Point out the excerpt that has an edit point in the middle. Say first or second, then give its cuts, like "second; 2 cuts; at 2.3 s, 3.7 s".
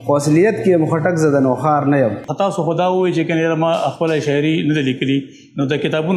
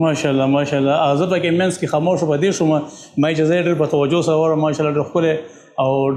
first; 1 cut; at 2.3 s